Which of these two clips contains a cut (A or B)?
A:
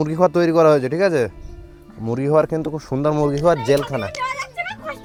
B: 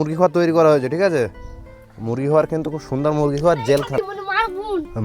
B